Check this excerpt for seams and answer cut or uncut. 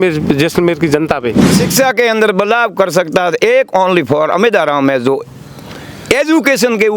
cut